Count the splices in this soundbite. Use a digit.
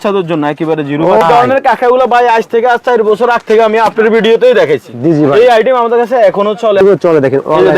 2